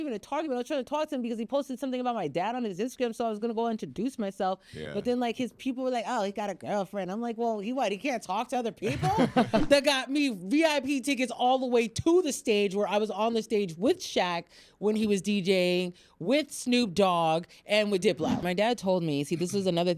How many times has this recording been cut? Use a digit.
2